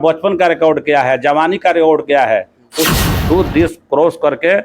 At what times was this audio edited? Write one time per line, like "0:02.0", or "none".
0:02.9